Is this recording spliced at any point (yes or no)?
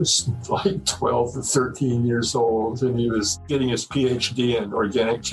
yes